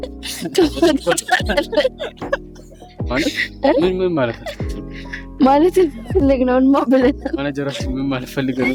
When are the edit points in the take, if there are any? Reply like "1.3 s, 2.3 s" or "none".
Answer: none